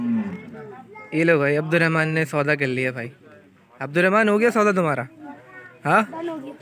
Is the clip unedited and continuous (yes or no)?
yes